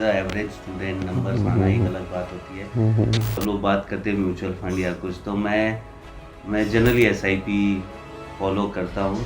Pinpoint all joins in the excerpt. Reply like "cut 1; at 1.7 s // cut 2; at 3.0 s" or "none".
cut 1; at 3.3 s